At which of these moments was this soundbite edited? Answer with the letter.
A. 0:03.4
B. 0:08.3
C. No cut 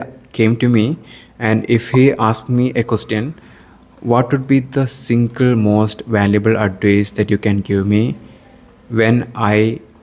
C